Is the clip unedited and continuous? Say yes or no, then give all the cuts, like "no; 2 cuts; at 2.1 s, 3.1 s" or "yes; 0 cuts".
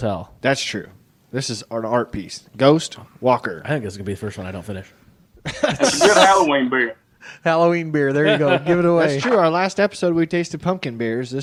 yes; 0 cuts